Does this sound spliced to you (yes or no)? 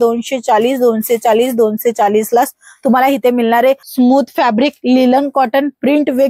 yes